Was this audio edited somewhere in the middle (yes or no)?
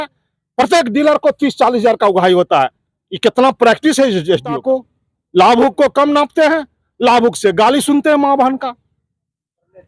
yes